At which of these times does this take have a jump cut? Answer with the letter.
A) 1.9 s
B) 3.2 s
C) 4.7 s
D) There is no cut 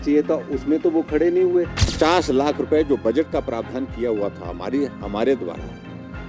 A